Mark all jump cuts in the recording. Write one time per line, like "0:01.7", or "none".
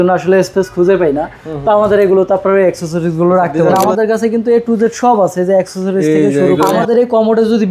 0:03.8
0:06.8